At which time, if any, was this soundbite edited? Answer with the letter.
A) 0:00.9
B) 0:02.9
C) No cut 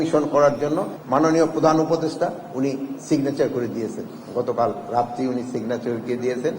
A